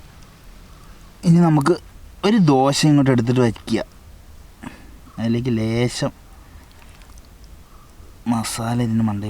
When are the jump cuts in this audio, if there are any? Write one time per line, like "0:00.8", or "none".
0:01.2